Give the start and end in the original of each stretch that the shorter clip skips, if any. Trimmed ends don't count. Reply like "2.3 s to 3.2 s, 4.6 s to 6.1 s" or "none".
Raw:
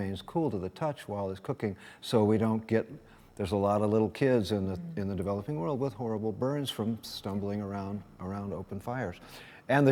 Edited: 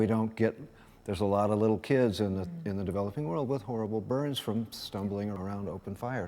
7.7 s to 8.2 s